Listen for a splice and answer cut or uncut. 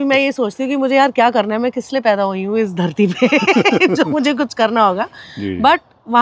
uncut